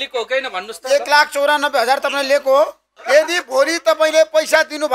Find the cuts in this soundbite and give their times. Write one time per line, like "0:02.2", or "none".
0:03.0

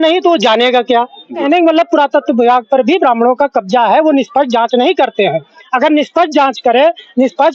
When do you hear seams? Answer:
0:01.4

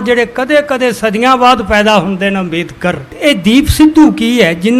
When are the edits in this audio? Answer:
0:03.1

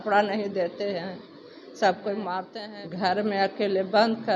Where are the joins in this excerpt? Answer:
0:02.6

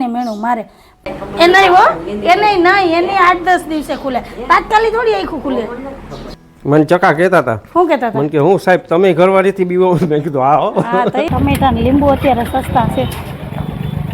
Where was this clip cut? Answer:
0:00.9
0:06.2
0:11.3

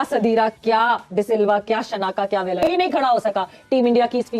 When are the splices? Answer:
none

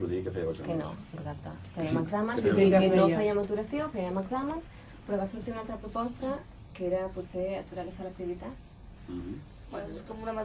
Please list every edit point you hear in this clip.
none

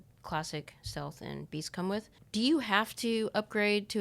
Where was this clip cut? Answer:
0:02.2

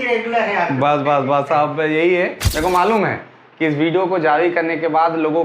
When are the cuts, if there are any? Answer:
0:02.4

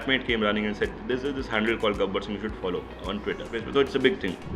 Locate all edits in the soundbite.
0:03.6

